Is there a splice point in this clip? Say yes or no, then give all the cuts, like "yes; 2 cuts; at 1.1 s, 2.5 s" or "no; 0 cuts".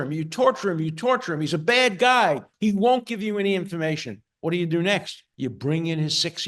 yes; 2 cuts; at 2.5 s, 5.2 s